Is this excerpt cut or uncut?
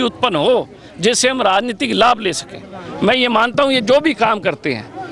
uncut